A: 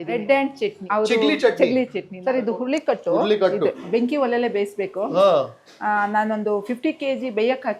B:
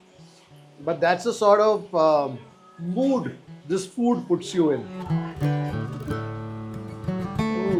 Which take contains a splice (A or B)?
A